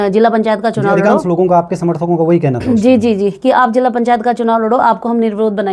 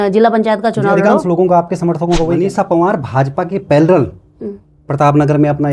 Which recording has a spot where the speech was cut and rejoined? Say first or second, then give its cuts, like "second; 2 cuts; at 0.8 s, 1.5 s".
second; 1 cut; at 2.4 s